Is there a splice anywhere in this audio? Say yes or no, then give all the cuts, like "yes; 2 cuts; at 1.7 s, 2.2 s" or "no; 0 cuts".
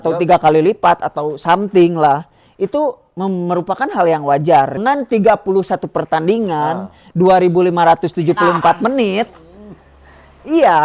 yes; 1 cut; at 4.8 s